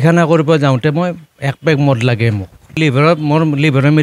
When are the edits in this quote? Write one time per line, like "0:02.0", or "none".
0:02.8